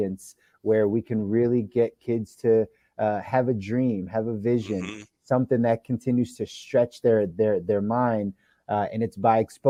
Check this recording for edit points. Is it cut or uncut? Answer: uncut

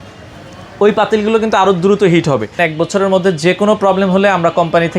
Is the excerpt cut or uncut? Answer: cut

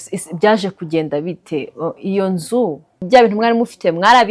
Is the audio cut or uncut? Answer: cut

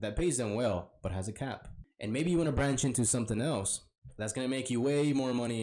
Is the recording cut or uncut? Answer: cut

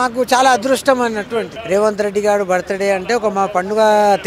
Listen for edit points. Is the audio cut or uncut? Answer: cut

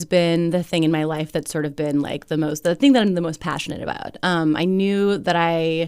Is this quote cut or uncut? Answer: uncut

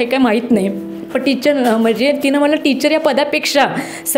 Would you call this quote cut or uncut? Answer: uncut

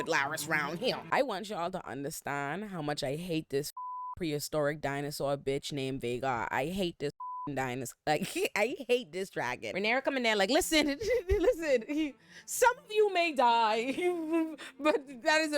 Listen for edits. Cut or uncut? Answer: cut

